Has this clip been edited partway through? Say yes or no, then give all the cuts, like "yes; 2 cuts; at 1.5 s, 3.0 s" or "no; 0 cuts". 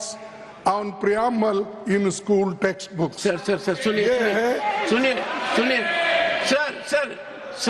no; 0 cuts